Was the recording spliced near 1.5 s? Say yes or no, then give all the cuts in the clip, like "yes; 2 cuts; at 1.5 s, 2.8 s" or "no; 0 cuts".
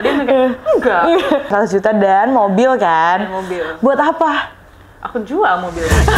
yes; 1 cut; at 1.5 s